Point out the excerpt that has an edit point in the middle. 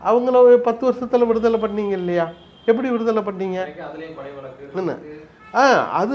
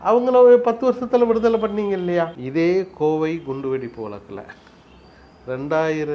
second; 1 cut; at 2.4 s

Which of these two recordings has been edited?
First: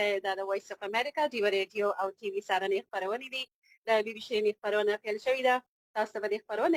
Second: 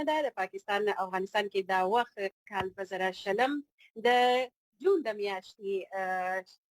second; 1 cut; at 2.5 s

